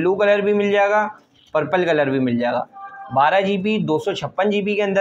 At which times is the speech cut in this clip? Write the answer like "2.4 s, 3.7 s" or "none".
none